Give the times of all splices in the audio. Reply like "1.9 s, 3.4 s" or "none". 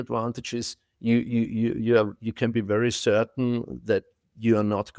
none